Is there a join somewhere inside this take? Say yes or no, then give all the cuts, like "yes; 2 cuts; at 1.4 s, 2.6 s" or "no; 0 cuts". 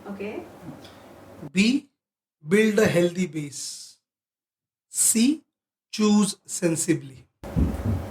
no; 0 cuts